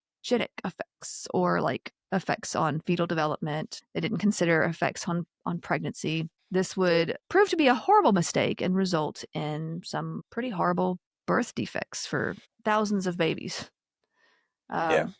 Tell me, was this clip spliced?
yes; 6 cuts; at 3.8 s, 6.4 s, 7.2 s, 10.2 s, 11.1 s, 12.5 s

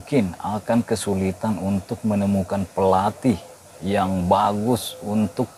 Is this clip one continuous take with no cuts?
yes; 0 cuts

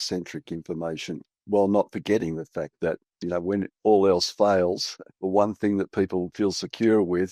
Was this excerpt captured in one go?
no; 1 cut; at 6.3 s

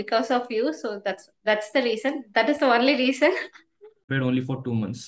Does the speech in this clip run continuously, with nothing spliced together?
no; 1 cut; at 4.0 s

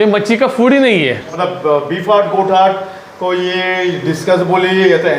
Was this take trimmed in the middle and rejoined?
yes; 1 cut; at 1.3 s

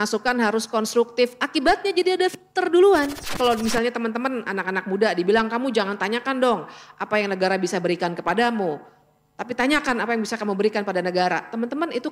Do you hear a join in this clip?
yes; 1 cut; at 3.3 s

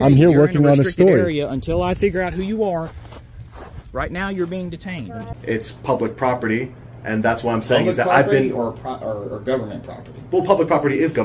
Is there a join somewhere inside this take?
yes; 1 cut; at 5.3 s

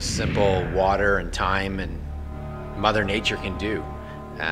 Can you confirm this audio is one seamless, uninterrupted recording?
yes; 0 cuts

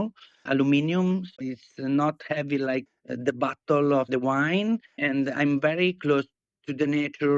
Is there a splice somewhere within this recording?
yes; 3 cuts; at 1.3 s, 2.9 s, 5.0 s

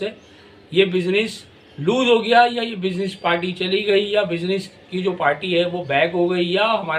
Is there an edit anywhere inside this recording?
no; 0 cuts

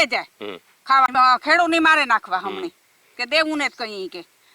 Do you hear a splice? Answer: yes; 1 cut; at 1.1 s

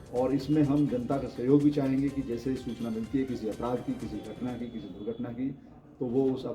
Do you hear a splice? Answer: no; 0 cuts

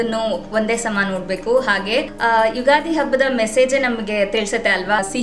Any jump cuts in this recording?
no; 0 cuts

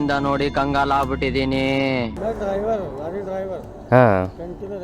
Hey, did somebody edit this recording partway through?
yes; 1 cut; at 2.1 s

